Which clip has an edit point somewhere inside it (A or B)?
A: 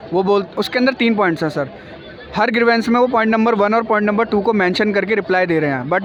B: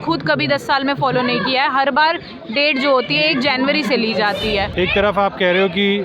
B